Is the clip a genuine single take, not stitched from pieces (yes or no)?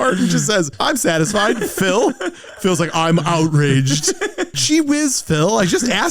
no